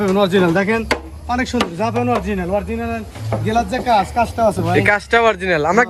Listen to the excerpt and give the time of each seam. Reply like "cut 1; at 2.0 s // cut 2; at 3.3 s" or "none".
none